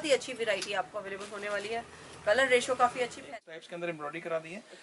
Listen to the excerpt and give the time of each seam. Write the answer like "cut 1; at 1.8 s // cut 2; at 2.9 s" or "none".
cut 1; at 3.3 s